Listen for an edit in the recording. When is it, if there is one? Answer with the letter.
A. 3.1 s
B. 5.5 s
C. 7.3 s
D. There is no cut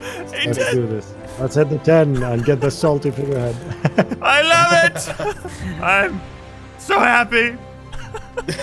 B